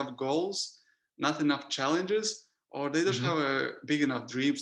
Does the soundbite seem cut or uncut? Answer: uncut